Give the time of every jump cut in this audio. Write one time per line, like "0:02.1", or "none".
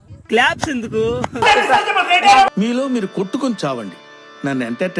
0:01.4